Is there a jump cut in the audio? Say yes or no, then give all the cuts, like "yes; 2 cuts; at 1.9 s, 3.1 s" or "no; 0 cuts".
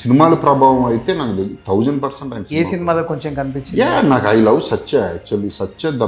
no; 0 cuts